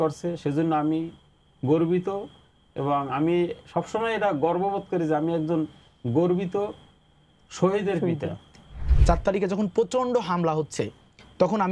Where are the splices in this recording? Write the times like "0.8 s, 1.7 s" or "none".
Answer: 8.9 s